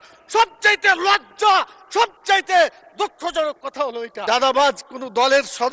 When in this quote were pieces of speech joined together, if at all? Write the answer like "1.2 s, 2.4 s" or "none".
4.1 s